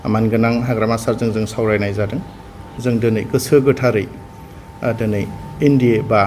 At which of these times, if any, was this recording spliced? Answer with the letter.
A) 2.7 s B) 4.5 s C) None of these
A